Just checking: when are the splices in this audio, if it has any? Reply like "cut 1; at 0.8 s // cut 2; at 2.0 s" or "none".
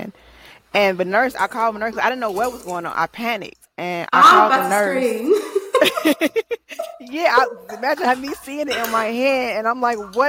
cut 1; at 6.7 s